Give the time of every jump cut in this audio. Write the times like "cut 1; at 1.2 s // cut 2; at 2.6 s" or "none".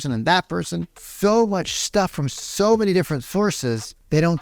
cut 1; at 0.9 s